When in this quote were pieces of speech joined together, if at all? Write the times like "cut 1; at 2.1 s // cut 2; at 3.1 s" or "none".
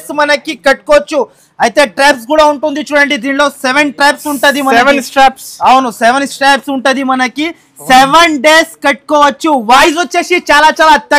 cut 1; at 9.8 s